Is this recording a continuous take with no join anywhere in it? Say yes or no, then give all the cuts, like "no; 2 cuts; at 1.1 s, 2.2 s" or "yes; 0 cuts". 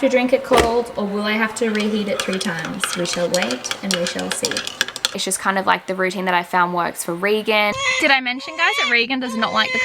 no; 2 cuts; at 5.2 s, 7.8 s